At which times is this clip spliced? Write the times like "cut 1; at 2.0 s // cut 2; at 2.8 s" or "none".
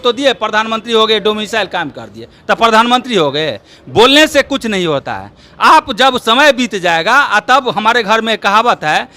none